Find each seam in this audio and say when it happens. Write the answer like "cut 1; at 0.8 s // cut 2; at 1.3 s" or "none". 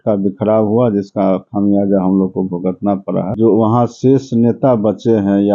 cut 1; at 3.3 s